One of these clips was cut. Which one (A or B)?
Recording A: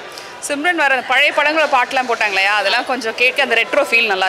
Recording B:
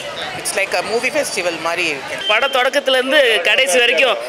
B